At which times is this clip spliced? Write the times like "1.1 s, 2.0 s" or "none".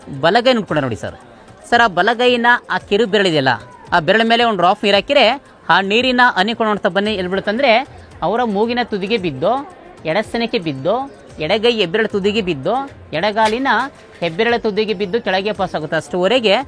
none